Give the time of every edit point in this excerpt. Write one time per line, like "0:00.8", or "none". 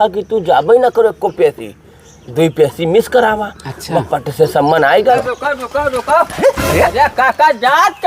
0:05.2